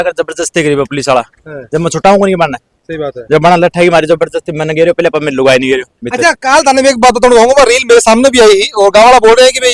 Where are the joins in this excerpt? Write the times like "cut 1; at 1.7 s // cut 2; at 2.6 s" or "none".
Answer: none